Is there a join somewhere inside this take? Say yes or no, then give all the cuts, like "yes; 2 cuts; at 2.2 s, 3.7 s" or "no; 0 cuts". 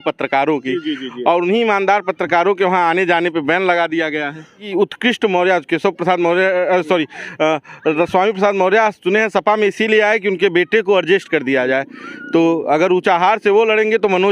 yes; 1 cut; at 4.6 s